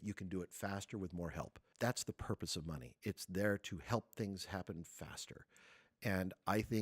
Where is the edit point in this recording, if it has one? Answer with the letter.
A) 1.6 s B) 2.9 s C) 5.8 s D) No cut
A